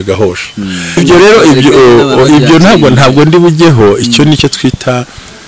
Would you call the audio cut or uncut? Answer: cut